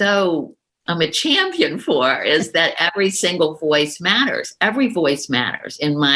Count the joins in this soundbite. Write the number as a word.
zero